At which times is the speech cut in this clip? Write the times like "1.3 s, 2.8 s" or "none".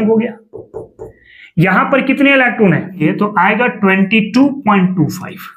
3.0 s